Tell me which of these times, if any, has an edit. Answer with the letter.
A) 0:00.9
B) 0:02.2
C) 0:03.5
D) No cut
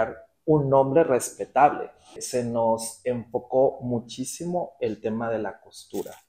B